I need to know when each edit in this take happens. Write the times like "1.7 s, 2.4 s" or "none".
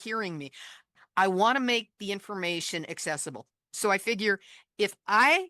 0.9 s

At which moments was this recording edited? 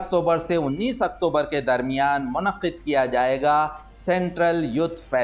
none

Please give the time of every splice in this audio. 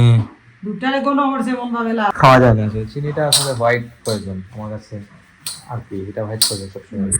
2.1 s

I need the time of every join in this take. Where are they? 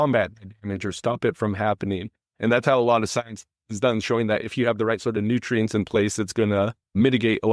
none

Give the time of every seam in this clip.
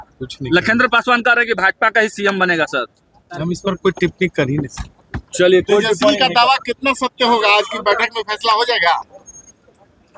none

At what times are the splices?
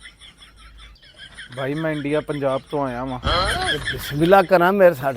1.1 s

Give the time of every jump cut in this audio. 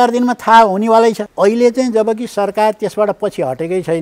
1.3 s

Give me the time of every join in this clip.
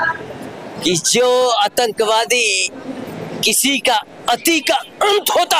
none

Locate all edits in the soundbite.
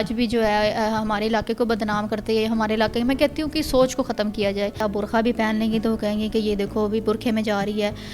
4.8 s

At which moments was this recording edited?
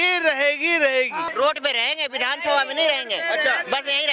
1.2 s

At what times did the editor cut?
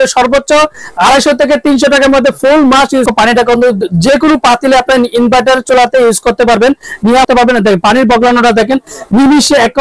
3.1 s, 7.2 s

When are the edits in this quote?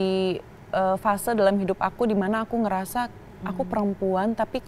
none

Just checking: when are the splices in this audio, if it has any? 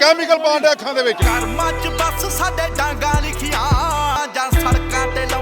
none

